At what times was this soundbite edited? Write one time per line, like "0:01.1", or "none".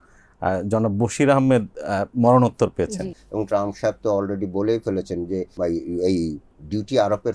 0:03.2
0:05.5